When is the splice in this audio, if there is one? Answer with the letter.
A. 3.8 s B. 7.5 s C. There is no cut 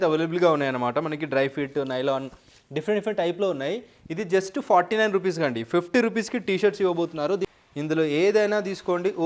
B